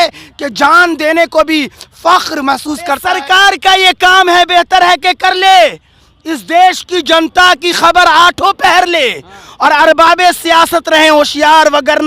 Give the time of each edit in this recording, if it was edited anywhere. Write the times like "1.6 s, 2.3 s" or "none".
3.0 s